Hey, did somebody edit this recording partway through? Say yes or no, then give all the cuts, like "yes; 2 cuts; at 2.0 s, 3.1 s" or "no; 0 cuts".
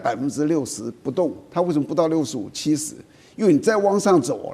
no; 0 cuts